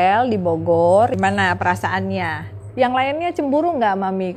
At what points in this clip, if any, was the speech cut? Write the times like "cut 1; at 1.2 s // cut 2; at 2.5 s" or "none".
cut 1; at 1.1 s // cut 2; at 2.6 s

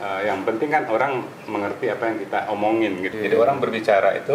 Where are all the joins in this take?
cut 1; at 3.1 s

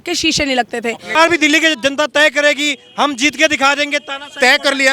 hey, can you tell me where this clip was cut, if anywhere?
cut 1; at 1.0 s

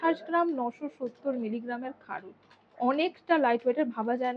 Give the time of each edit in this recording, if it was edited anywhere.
none

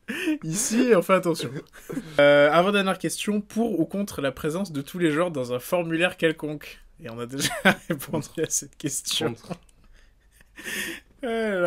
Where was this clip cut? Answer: cut 1; at 2.2 s

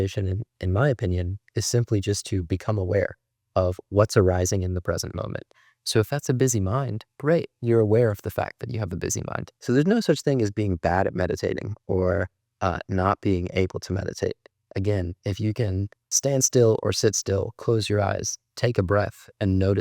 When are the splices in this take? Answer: cut 1; at 9.5 s // cut 2; at 16.0 s

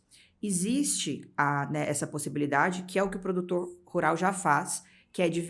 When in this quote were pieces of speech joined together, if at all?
none

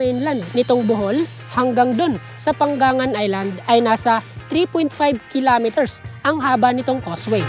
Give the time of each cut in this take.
none

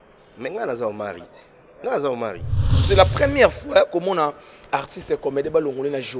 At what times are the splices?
cut 1; at 2.8 s

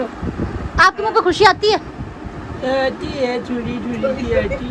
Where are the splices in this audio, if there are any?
cut 1; at 3.8 s

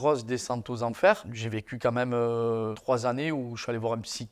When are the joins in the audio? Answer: none

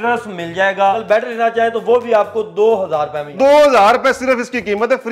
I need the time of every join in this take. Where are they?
cut 1; at 1.0 s // cut 2; at 3.2 s

